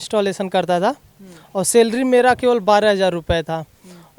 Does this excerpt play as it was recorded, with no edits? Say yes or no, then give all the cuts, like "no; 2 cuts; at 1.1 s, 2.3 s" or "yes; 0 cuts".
yes; 0 cuts